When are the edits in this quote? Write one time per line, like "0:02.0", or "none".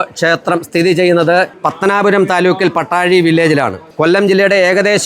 none